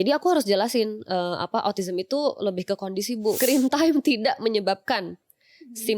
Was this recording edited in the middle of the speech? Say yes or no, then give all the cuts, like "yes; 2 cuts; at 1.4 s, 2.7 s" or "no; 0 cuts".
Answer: yes; 1 cut; at 3.4 s